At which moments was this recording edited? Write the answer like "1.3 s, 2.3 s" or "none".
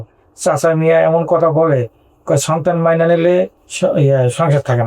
3.6 s